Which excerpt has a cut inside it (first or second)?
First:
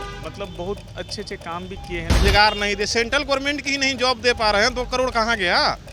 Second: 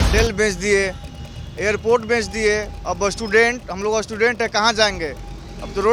first